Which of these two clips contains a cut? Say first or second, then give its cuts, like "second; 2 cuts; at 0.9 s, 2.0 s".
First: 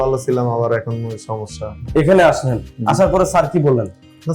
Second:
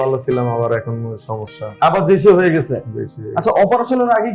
first; 1 cut; at 1.8 s